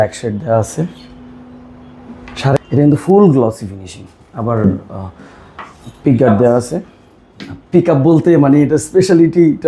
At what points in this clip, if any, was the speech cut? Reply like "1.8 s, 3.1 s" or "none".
2.6 s

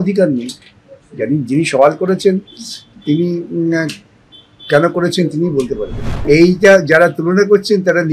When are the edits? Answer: 6.1 s

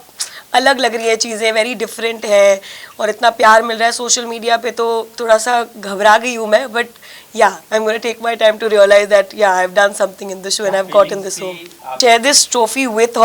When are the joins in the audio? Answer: 12.0 s

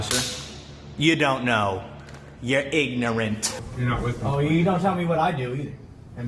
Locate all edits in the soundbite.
3.6 s

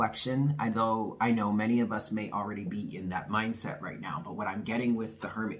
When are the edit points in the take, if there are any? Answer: none

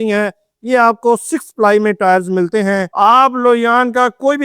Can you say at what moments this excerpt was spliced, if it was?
2.9 s

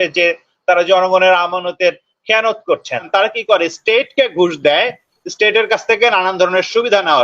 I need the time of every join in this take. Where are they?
3.1 s

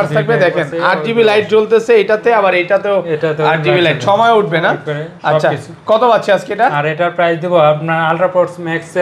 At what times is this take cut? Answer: none

